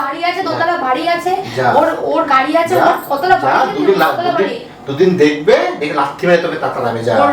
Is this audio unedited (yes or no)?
yes